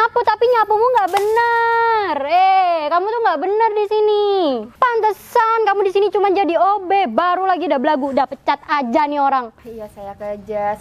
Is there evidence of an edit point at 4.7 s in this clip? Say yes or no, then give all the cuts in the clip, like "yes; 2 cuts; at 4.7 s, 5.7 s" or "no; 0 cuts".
yes; 2 cuts; at 4.7 s, 9.7 s